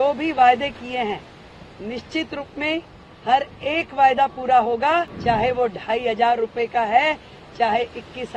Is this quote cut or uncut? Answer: cut